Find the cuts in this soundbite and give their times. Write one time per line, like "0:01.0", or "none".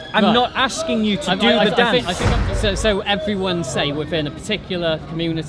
0:02.3